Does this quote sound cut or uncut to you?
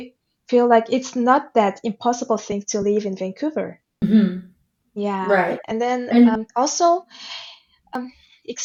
uncut